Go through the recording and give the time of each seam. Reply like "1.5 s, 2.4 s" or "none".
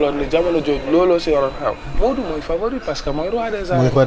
1.9 s